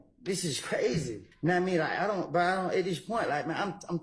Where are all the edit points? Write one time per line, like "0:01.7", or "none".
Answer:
0:01.2